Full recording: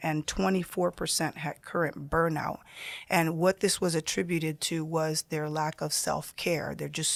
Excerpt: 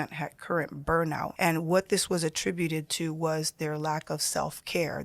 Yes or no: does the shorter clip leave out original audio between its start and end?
yes